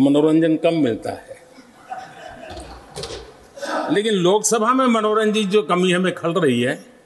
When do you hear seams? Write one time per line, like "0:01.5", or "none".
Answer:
none